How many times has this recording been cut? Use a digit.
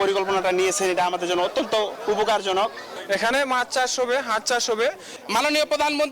1